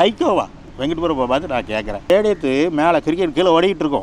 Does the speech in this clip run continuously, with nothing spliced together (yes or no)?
yes